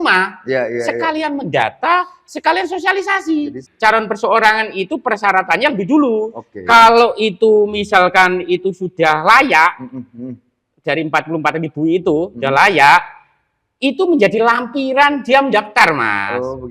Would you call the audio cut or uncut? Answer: cut